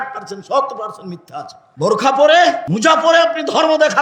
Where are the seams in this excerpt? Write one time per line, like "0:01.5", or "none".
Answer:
0:01.6
0:02.7